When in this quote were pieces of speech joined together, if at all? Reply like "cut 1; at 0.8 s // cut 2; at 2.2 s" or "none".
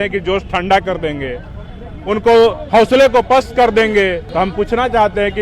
cut 1; at 4.2 s